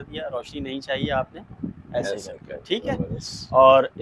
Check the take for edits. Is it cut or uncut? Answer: uncut